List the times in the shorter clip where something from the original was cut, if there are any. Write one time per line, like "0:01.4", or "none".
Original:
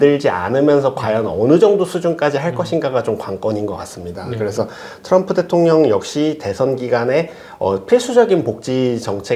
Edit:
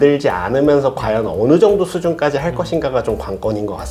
none